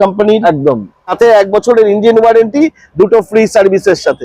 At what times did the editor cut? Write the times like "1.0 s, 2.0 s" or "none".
1.0 s